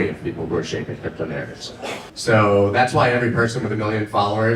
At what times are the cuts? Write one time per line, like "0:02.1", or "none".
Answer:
0:02.0